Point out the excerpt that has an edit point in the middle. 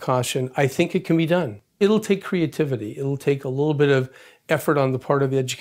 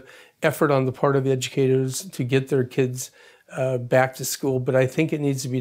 first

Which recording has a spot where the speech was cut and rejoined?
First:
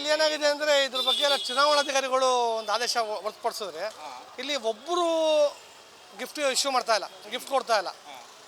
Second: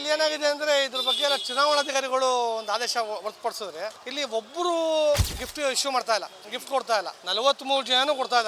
second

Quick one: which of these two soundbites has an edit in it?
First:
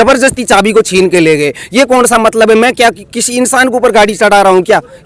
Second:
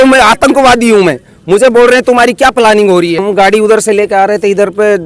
second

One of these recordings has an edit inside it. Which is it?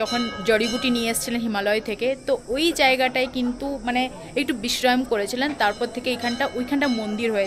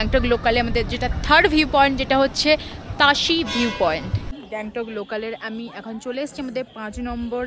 second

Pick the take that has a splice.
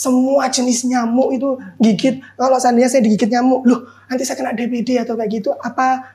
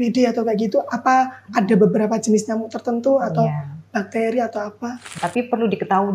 second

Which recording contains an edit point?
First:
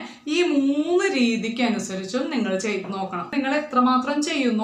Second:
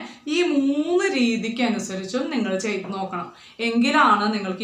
first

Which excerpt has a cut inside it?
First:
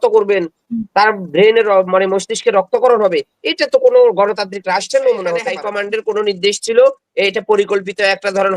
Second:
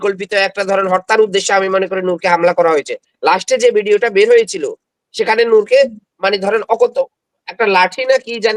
first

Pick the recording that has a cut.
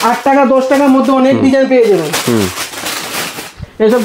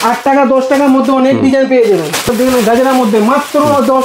second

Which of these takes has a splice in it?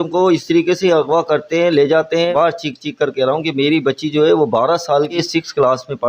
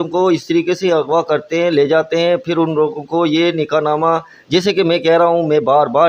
first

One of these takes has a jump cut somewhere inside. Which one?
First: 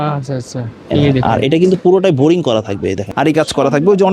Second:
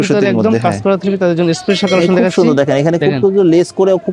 first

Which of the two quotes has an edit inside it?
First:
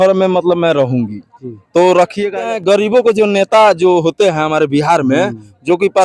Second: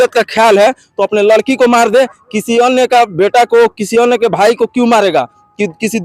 first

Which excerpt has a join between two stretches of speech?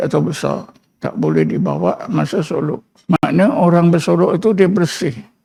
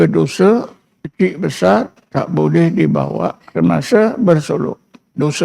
second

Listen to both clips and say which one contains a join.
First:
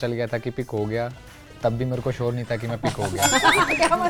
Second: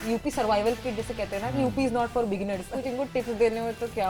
second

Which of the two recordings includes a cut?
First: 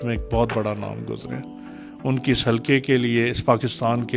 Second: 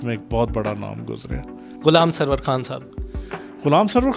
second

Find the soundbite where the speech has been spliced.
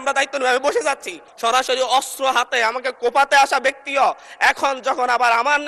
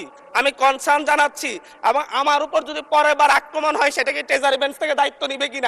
first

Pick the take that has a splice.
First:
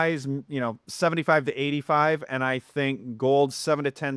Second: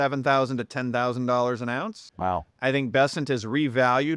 second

